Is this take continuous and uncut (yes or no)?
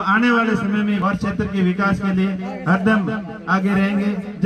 no